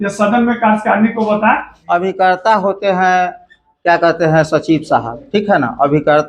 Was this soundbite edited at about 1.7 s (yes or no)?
yes